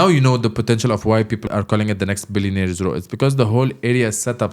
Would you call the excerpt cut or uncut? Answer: cut